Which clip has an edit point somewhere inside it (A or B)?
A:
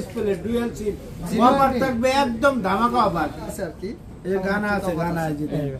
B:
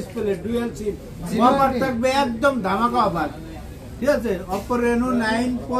A